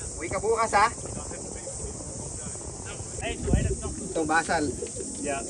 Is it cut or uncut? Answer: cut